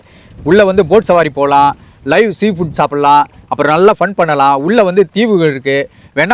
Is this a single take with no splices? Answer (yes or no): yes